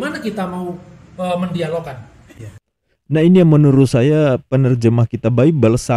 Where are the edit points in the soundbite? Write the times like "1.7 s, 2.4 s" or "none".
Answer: 2.4 s